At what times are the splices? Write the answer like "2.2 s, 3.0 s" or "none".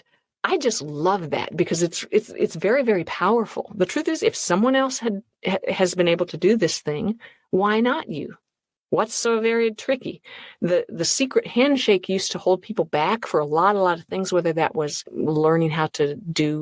none

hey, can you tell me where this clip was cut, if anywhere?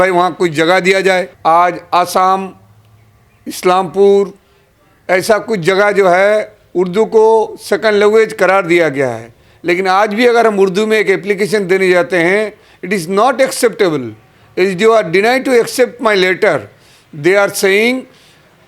1.3 s

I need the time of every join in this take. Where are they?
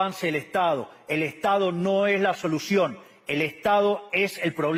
none

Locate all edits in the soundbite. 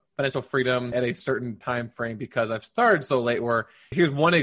none

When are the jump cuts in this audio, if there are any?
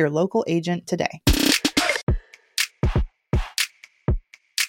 2.0 s

